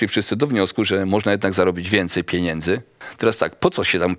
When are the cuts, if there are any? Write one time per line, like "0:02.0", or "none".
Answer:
0:03.0